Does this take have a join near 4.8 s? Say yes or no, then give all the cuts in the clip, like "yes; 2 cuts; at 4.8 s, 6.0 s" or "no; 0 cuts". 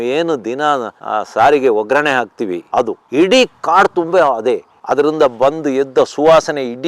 yes; 1 cut; at 4.8 s